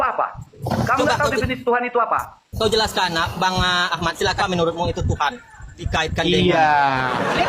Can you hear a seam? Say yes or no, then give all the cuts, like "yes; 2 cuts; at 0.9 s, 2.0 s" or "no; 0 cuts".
yes; 2 cuts; at 4.4 s, 5.8 s